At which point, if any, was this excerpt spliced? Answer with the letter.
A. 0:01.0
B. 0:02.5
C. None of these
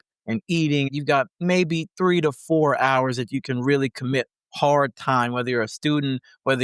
A